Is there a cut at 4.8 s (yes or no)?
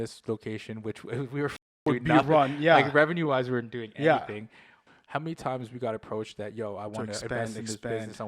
yes